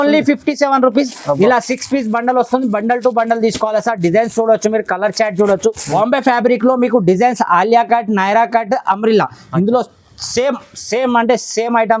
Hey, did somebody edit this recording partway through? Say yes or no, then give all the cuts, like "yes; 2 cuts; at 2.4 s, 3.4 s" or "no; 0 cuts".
yes; 1 cut; at 5.8 s